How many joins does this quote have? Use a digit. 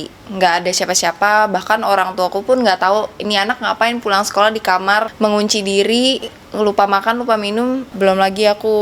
2